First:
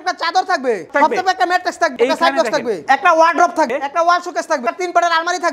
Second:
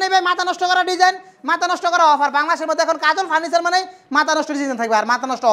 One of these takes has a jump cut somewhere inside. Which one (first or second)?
first